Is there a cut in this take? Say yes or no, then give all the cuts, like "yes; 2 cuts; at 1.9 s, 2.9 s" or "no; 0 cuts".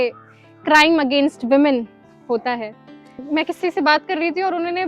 yes; 1 cut; at 3.2 s